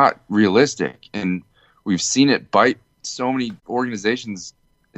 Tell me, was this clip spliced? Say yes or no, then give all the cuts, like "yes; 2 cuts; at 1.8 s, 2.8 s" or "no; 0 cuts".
yes; 1 cut; at 3.6 s